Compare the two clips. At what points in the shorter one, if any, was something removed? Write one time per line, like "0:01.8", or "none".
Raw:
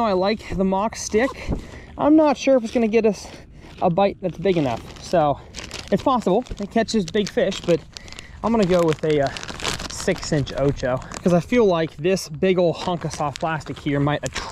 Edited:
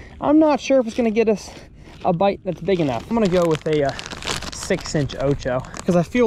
0:03.1